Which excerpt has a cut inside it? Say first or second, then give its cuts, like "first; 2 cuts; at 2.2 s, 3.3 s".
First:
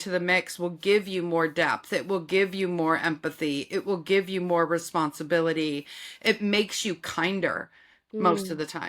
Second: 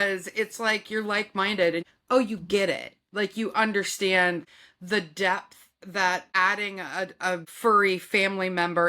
second; 2 cuts; at 1.8 s, 6.3 s